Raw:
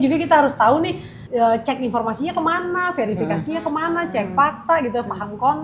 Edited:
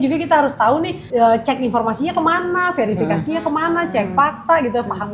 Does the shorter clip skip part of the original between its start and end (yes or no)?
yes